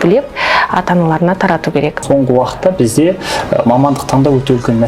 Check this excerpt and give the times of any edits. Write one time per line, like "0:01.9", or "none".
0:02.0